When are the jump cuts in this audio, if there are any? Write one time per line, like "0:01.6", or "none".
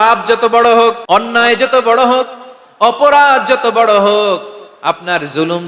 0:01.0